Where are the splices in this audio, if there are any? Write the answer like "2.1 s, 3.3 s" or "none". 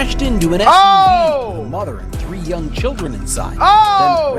none